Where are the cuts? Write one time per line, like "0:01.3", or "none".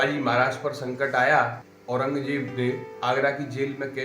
0:01.7
0:02.6